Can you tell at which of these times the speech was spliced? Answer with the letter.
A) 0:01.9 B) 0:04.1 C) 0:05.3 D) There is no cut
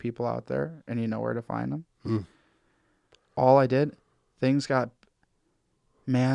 D